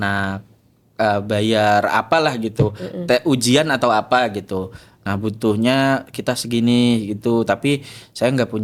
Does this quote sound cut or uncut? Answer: uncut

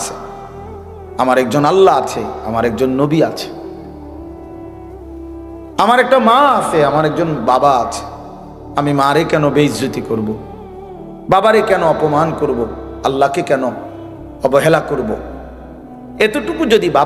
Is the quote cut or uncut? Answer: uncut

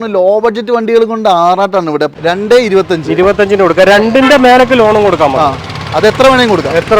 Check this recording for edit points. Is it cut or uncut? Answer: cut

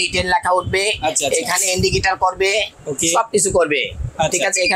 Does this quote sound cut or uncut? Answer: uncut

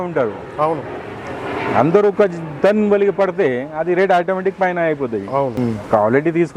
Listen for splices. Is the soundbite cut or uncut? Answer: cut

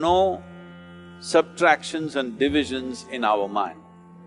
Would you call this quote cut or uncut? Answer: uncut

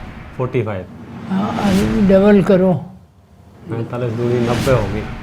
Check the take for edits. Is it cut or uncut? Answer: uncut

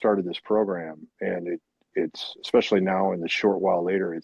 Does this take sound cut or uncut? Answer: uncut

